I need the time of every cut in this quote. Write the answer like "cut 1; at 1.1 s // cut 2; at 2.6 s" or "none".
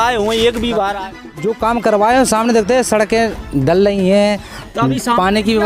cut 1; at 1.1 s